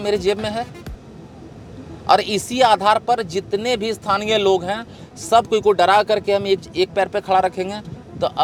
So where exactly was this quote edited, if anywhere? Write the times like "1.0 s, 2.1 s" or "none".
none